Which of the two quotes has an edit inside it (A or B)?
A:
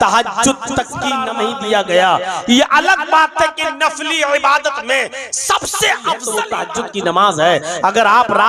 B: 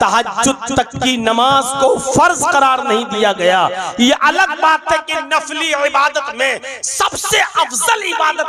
A